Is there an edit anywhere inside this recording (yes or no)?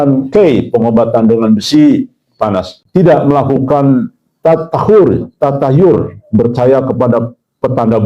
yes